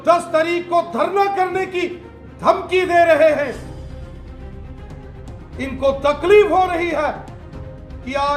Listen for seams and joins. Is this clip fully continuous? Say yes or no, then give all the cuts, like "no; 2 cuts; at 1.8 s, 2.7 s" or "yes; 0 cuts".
no; 2 cuts; at 3.6 s, 5.6 s